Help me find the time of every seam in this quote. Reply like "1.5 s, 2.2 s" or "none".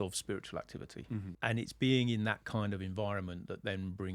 1.3 s